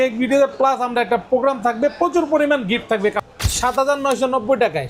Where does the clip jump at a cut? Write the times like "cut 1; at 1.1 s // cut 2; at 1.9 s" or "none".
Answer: cut 1; at 3.2 s